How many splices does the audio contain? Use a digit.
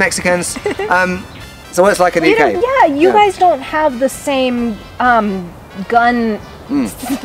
1